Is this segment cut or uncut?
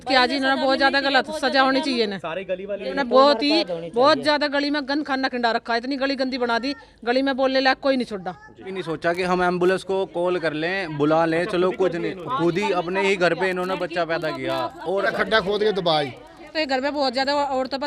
cut